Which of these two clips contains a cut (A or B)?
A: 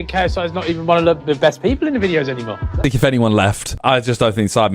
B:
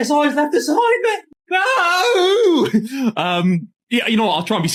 A